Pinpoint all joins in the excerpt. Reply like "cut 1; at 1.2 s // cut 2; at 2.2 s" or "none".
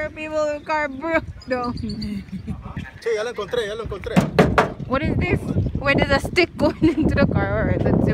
cut 1; at 2.7 s